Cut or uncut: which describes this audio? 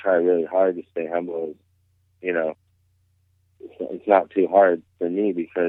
uncut